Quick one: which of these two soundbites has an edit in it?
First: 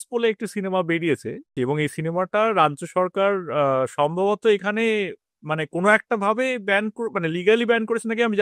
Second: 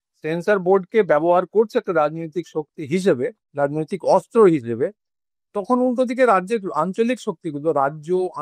first; 1 cut; at 1.5 s

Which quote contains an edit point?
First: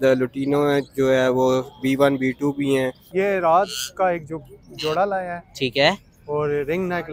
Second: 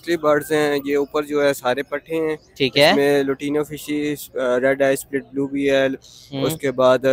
first; 1 cut; at 3.0 s

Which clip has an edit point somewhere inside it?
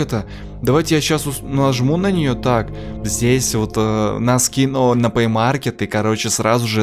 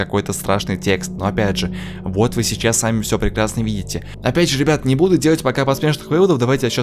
first; 1 cut; at 3.0 s

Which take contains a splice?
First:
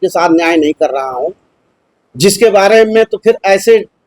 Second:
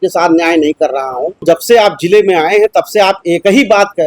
second; 1 cut; at 1.4 s

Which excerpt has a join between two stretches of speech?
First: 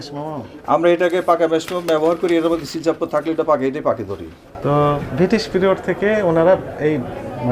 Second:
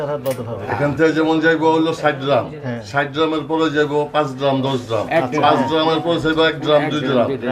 first; 1 cut; at 4.5 s

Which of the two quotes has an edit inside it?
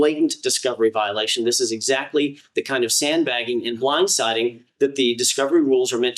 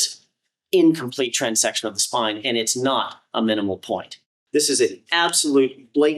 second; 1 cut; at 4.3 s

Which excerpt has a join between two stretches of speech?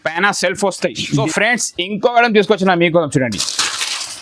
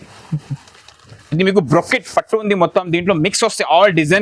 first; 1 cut; at 1.2 s

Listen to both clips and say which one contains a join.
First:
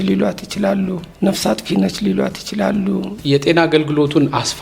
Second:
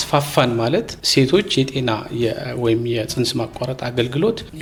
first; 1 cut; at 3.2 s

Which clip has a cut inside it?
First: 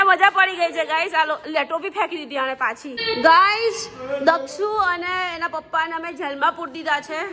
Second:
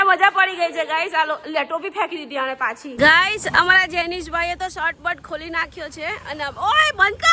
second; 1 cut; at 2.9 s

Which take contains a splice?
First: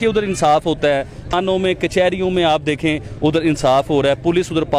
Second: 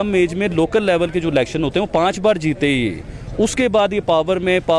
first; 1 cut; at 1.3 s

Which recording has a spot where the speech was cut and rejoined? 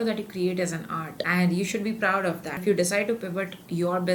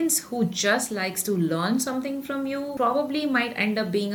first; 1 cut; at 2.6 s

